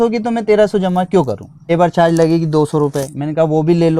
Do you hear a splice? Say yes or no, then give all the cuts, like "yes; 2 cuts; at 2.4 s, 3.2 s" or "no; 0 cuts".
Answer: yes; 1 cut; at 1.6 s